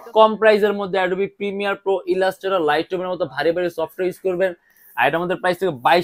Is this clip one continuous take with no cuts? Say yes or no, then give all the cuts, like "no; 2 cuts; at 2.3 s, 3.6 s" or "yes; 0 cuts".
yes; 0 cuts